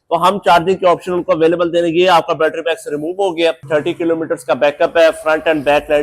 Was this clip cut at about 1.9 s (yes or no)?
no